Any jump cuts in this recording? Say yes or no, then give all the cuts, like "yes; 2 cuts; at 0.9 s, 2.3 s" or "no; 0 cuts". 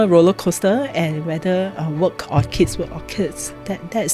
no; 0 cuts